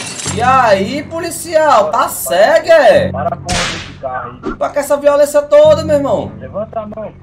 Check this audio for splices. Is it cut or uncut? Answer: cut